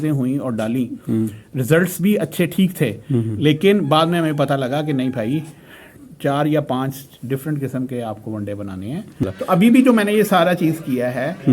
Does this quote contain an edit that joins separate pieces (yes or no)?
yes